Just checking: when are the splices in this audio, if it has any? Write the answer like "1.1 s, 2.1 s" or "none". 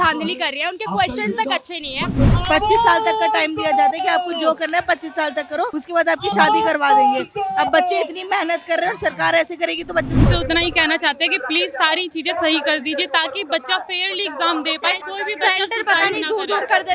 2.4 s, 5.8 s, 10.2 s, 15.0 s